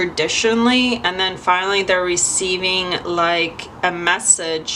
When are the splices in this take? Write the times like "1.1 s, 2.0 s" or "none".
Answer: none